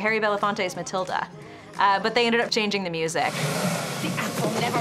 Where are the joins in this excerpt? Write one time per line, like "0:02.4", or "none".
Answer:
0:01.7
0:03.6